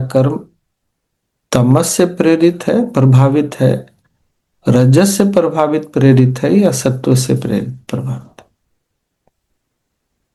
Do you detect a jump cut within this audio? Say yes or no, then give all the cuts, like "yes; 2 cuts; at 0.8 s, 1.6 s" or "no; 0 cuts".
no; 0 cuts